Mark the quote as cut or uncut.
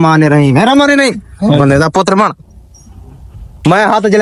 uncut